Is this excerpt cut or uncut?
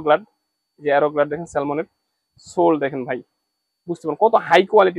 uncut